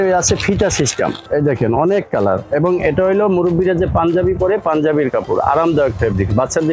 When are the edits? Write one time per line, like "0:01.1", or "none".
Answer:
0:01.2